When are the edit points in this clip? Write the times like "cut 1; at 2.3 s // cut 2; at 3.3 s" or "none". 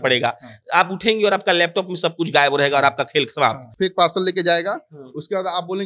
cut 1; at 3.7 s